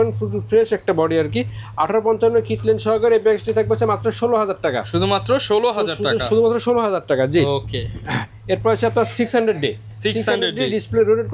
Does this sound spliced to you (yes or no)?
no